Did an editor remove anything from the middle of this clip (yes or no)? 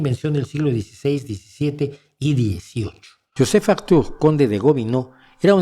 yes